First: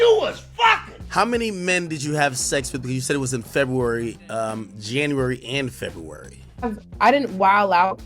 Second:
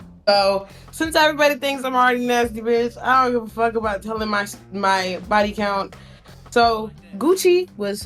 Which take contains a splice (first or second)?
first